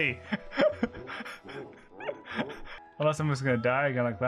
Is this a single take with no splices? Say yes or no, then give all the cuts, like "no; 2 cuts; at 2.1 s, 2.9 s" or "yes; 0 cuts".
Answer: no; 1 cut; at 2.7 s